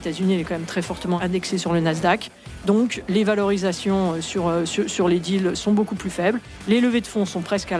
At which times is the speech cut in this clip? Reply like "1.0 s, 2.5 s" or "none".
1.2 s, 3.0 s